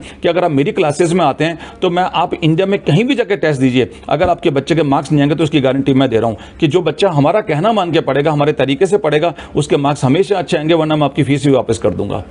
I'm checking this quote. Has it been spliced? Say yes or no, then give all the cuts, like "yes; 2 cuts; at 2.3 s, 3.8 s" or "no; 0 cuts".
no; 0 cuts